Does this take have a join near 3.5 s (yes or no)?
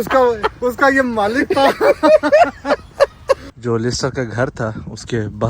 yes